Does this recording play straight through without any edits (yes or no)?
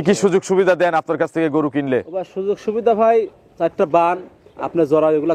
yes